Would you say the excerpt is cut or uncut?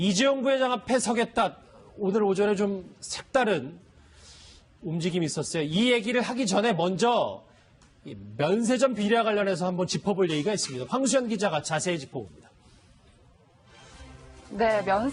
uncut